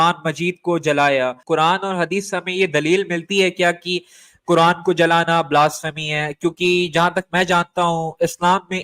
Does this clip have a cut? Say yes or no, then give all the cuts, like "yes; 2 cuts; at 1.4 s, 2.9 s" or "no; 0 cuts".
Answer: yes; 1 cut; at 1.4 s